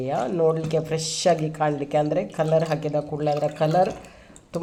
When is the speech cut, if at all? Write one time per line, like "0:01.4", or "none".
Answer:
none